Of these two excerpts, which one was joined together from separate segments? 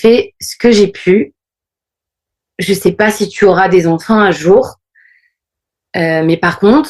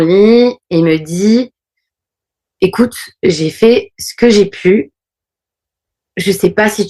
second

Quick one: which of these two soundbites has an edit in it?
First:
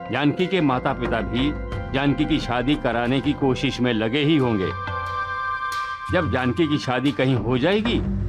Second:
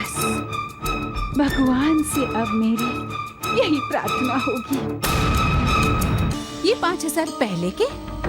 second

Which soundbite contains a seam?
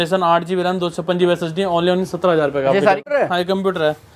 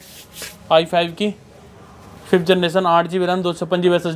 first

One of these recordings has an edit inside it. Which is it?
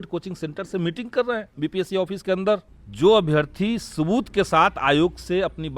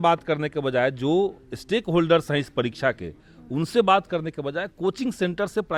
first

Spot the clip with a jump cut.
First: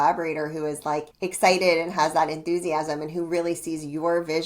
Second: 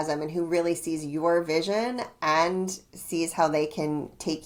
first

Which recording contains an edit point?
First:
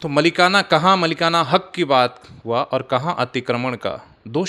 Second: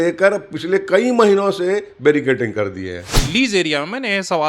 second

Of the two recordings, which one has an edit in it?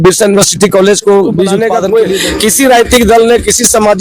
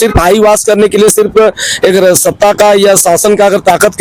first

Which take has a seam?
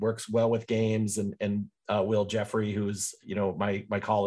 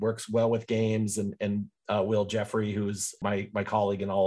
second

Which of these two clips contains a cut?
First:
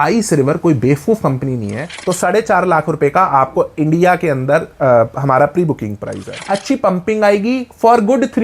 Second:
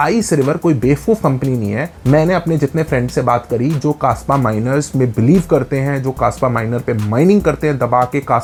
first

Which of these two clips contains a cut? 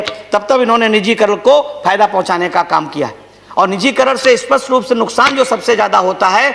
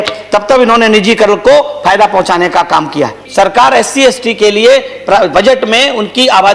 second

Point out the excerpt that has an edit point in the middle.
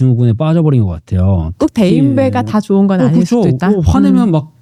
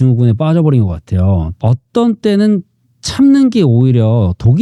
second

